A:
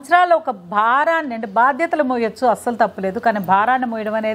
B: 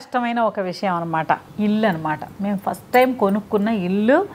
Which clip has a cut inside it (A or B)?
B